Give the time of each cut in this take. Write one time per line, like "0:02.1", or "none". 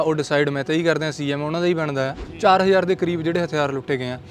0:02.2